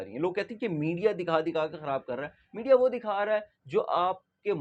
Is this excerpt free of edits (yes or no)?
yes